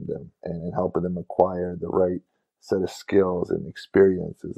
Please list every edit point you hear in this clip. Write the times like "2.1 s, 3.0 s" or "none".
none